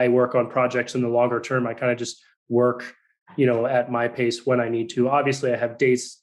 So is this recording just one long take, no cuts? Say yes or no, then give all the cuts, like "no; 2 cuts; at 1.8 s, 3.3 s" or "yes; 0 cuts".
yes; 0 cuts